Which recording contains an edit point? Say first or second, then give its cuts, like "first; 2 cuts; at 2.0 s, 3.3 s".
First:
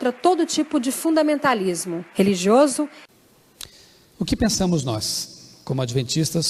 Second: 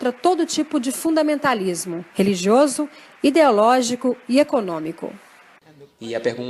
first; 1 cut; at 3.0 s